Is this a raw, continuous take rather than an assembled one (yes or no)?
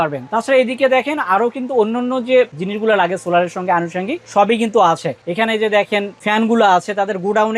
yes